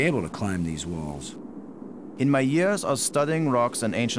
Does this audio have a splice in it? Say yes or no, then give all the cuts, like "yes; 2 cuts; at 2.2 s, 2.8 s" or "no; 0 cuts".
yes; 1 cut; at 1.7 s